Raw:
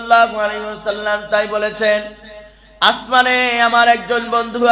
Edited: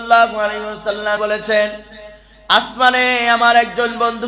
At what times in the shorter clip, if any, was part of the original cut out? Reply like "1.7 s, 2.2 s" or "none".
1.2 s

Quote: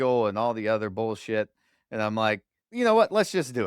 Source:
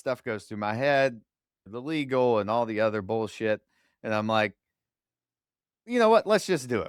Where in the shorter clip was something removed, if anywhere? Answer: 2.6 s

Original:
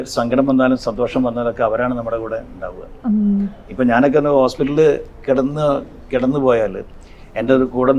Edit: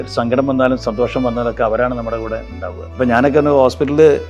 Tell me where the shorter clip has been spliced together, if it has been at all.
2.8 s

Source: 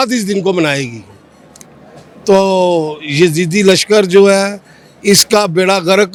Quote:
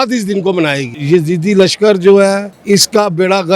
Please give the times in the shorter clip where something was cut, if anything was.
0.9 s, 2.5 s

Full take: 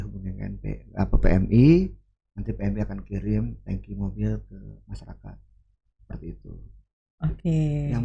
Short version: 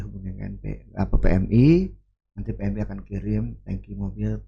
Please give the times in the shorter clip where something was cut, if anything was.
none

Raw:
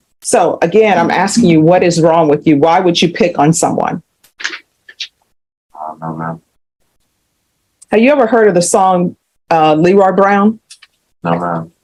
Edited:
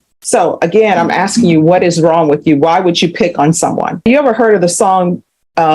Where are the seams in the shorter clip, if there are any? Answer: 4.1 s

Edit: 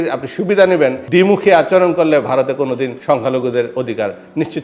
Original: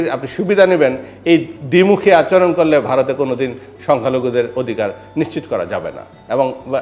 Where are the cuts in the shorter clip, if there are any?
1.0 s, 3.0 s

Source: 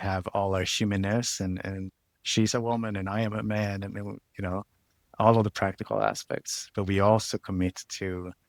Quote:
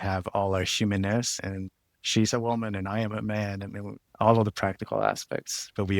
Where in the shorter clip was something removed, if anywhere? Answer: 1.4 s, 4.0 s

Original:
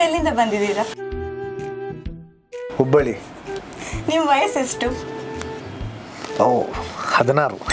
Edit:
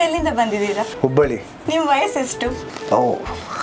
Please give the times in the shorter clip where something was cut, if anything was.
0.9 s, 1.5 s, 2.7 s

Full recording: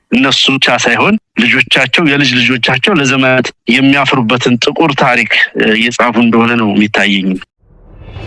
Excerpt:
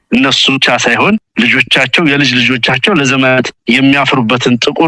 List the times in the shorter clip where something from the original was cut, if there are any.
none

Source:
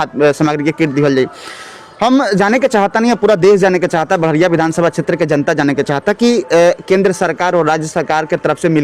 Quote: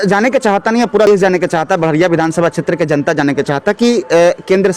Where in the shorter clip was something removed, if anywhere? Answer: 1.1 s

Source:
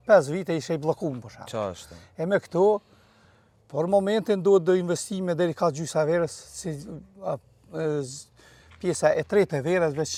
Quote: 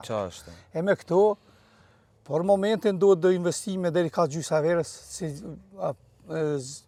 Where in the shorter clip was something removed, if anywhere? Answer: none

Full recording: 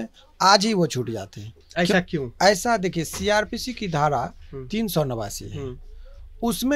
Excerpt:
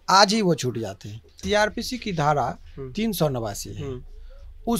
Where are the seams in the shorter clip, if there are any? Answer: 1.3 s

